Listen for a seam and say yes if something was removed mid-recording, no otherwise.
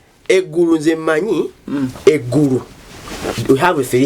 no